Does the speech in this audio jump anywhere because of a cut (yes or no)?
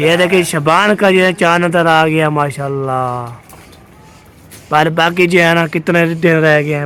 no